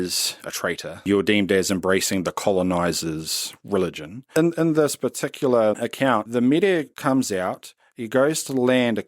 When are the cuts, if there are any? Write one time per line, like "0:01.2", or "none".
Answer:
0:01.1
0:04.3
0:06.2